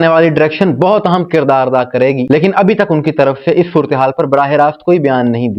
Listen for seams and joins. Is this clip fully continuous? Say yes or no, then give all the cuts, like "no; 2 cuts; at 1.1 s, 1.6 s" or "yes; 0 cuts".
yes; 0 cuts